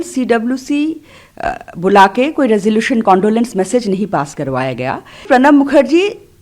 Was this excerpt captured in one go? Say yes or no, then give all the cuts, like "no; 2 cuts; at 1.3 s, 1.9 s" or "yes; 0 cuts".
no; 1 cut; at 5.2 s